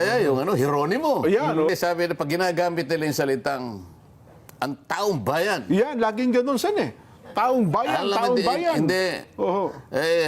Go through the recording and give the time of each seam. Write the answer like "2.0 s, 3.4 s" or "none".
1.7 s